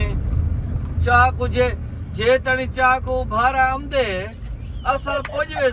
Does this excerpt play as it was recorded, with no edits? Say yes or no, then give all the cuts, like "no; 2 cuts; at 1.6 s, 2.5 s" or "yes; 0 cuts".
yes; 0 cuts